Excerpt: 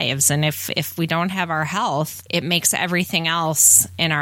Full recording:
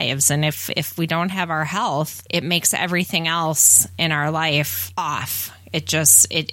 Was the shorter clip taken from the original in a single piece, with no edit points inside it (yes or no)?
yes